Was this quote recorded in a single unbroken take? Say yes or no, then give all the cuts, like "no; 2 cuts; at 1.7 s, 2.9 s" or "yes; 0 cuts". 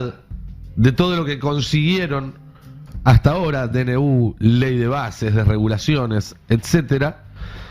yes; 0 cuts